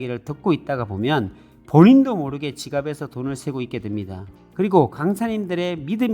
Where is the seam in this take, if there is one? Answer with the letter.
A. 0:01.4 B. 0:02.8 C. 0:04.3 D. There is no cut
C